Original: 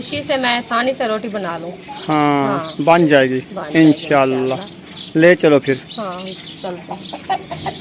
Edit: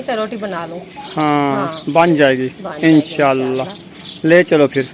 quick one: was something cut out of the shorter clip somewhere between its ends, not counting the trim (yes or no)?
no